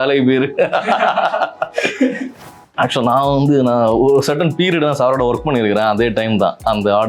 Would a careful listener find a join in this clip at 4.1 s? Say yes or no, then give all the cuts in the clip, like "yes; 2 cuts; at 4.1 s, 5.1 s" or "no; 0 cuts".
no; 1 cut; at 2.6 s